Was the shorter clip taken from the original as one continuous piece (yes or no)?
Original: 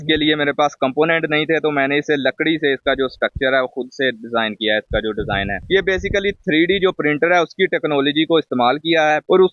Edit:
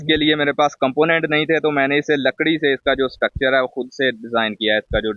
yes